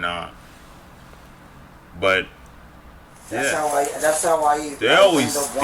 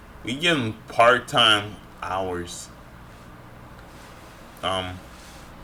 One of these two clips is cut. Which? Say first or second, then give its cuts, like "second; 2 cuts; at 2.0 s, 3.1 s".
first; 1 cut; at 3.5 s